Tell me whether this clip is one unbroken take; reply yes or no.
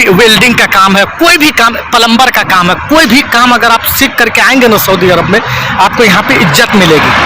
yes